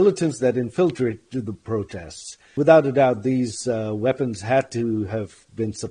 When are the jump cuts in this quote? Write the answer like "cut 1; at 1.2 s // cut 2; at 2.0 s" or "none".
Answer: cut 1; at 2.5 s

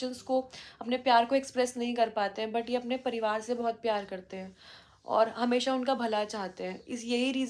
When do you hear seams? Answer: none

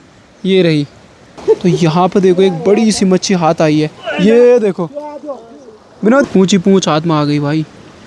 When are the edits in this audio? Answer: cut 1; at 1.4 s // cut 2; at 6.2 s

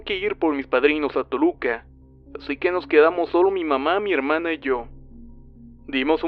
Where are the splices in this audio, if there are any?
cut 1; at 3.9 s

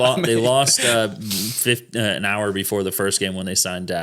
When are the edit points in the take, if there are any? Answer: none

